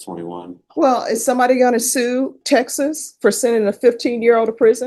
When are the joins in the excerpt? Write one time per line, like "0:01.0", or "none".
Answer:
none